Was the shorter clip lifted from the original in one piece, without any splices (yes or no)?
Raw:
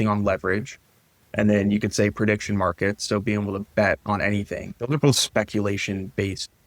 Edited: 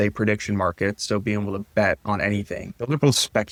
yes